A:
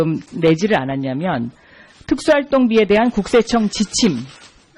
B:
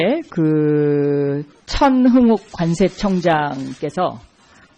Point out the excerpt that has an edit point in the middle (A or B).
A